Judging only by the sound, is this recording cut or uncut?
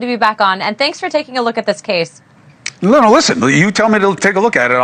uncut